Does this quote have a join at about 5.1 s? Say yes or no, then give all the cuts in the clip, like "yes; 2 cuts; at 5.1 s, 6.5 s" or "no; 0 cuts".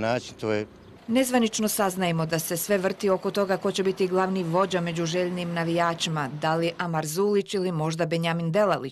no; 1 cut; at 1.3 s